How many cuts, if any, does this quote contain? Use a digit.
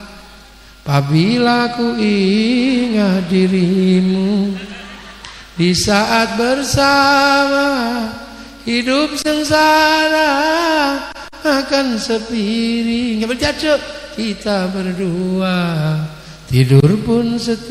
0